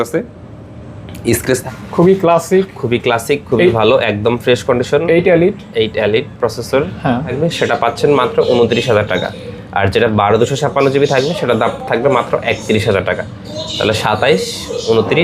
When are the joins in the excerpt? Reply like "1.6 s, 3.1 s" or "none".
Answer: 1.6 s, 7.3 s